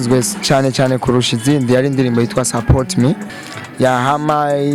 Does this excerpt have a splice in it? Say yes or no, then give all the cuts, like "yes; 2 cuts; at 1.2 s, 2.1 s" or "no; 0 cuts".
yes; 1 cut; at 3.4 s